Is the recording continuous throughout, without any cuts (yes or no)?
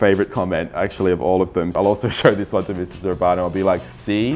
no